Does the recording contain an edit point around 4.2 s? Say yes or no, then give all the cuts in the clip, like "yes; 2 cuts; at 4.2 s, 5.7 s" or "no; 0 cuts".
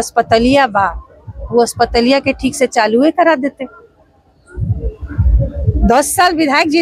no; 0 cuts